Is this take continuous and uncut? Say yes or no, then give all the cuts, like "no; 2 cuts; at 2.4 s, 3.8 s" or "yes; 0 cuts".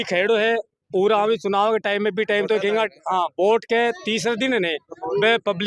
yes; 0 cuts